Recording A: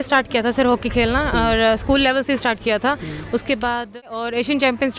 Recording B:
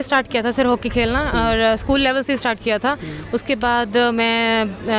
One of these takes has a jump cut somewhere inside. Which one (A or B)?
A